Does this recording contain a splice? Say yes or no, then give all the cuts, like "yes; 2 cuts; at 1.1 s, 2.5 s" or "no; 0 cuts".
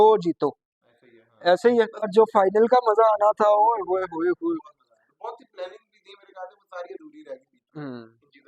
yes; 1 cut; at 2.1 s